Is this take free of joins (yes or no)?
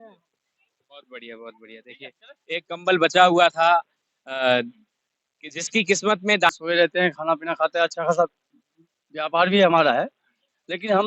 no